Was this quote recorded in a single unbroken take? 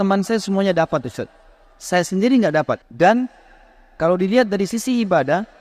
no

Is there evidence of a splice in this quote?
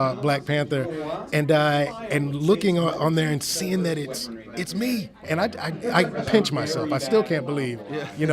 yes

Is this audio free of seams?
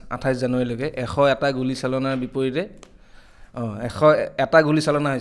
yes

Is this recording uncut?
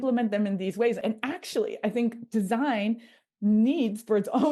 no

